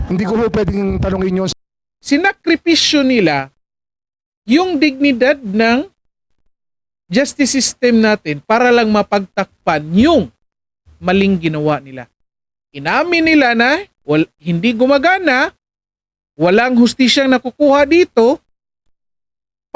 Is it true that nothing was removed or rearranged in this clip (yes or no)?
no